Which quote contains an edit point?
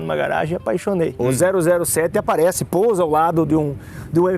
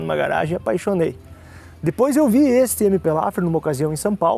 first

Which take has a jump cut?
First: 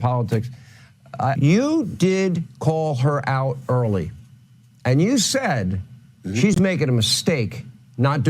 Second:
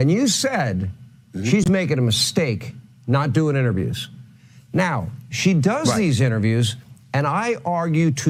first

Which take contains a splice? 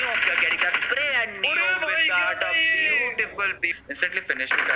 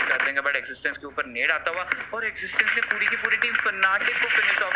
first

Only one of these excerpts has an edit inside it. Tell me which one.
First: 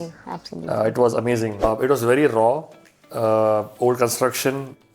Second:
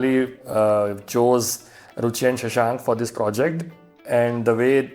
first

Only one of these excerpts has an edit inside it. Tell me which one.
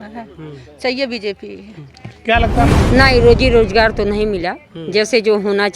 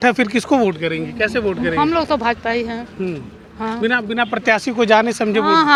first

